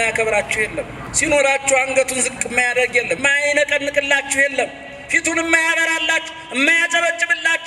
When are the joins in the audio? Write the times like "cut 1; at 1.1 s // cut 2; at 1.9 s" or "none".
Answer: cut 1; at 1.0 s // cut 2; at 3.2 s

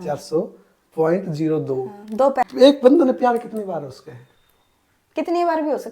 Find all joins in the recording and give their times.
cut 1; at 2.5 s

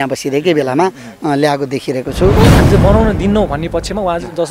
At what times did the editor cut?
cut 1; at 2.5 s

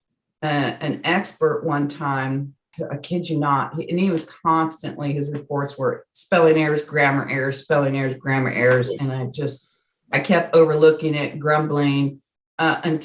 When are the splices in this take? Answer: cut 1; at 2.6 s

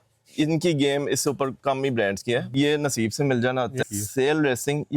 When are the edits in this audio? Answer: cut 1; at 2.5 s // cut 2; at 3.9 s

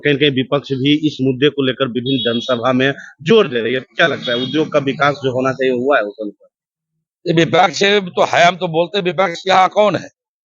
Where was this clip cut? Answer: none

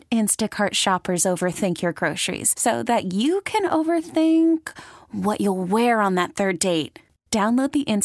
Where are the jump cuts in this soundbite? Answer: none

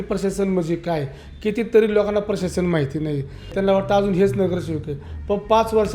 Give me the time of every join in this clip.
none

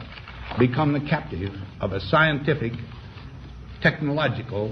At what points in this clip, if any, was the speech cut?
none

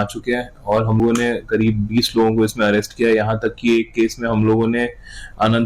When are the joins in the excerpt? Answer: cut 1; at 1.0 s

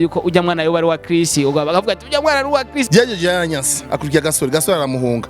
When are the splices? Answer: cut 1; at 2.9 s

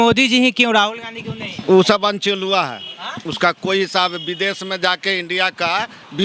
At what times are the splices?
cut 1; at 1.5 s

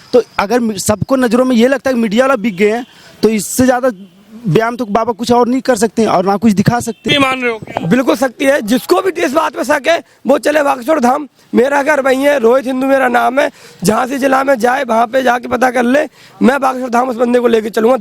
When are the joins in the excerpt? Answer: cut 1; at 7.0 s

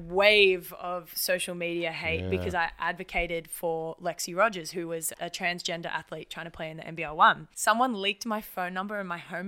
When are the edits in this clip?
cut 1; at 5.1 s // cut 2; at 7.5 s

